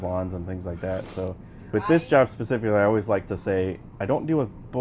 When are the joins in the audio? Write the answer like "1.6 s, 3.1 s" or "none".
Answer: 1.7 s